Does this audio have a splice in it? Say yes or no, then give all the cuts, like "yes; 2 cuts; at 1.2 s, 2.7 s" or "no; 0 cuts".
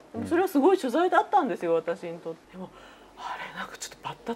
yes; 1 cut; at 2.4 s